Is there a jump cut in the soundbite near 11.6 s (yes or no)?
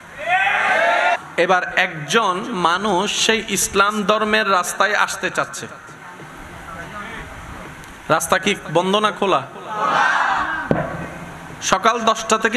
no